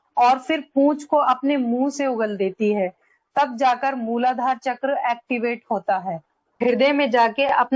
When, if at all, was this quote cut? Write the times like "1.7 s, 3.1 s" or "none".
6.6 s